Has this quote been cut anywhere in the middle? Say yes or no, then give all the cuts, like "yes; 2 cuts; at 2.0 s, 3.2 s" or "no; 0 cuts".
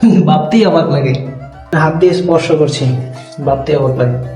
yes; 1 cut; at 1.7 s